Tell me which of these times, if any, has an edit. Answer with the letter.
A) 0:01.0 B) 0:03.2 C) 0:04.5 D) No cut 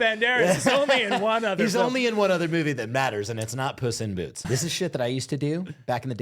C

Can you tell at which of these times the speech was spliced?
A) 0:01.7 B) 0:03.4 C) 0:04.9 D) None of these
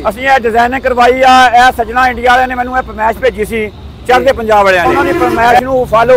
C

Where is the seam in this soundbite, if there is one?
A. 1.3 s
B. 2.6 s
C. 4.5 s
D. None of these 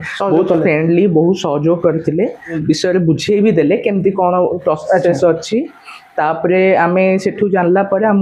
B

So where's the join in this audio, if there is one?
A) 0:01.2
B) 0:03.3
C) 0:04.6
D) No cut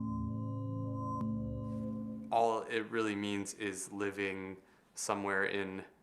A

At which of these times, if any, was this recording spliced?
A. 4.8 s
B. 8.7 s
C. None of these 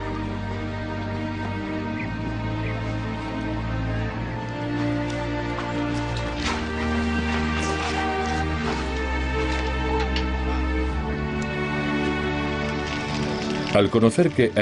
A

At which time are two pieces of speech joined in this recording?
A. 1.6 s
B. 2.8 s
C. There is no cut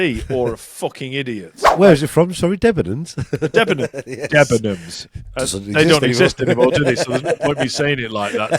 A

